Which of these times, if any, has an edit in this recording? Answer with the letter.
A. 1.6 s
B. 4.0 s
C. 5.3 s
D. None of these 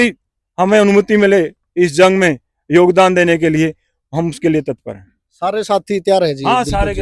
D